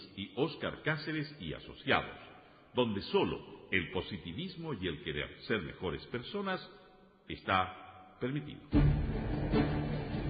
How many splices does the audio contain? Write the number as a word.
one